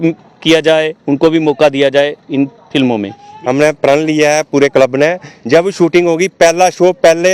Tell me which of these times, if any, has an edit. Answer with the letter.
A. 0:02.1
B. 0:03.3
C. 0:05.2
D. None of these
B